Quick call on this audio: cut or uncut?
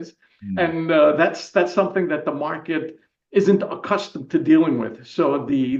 uncut